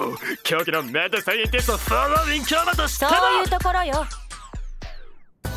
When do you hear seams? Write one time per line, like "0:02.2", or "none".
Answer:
0:04.1